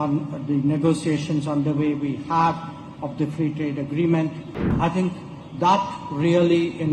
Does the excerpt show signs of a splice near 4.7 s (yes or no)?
yes